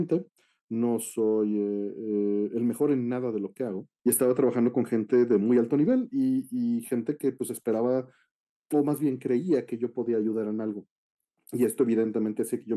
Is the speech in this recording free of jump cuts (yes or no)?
no